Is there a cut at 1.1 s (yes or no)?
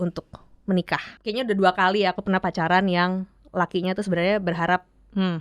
yes